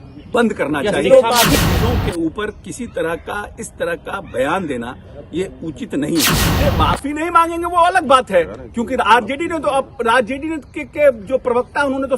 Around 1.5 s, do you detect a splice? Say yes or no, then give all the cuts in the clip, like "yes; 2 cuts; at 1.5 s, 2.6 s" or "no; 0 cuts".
yes; 2 cuts; at 1.5 s, 6.5 s